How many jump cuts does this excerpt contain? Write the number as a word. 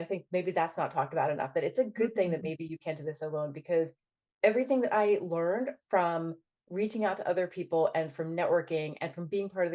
zero